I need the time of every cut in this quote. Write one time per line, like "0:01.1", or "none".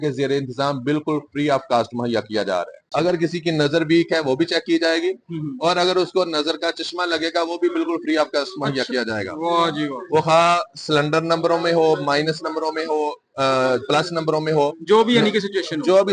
0:02.9